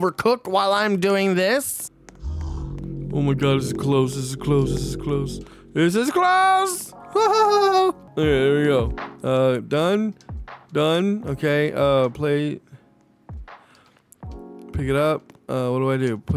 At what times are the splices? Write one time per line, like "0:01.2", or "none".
none